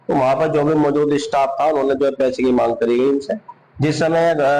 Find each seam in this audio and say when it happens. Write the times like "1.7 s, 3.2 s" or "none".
none